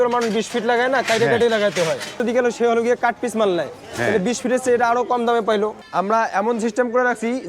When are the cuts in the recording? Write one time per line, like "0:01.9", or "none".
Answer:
0:02.2
0:05.8